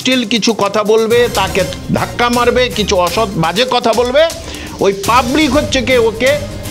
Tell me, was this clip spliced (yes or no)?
yes